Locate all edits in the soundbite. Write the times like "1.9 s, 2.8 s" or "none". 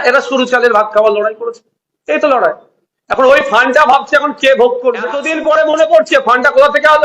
5.3 s